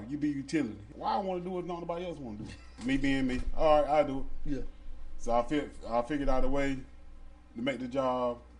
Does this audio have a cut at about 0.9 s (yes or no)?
yes